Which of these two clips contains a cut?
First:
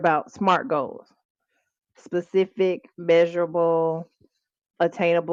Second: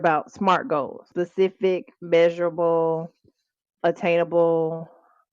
second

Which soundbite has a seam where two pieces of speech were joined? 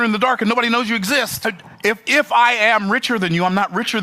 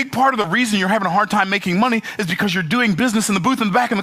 first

